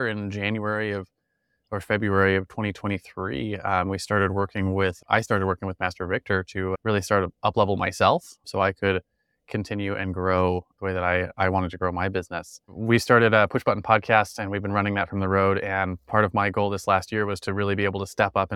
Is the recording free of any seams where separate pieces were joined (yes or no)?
yes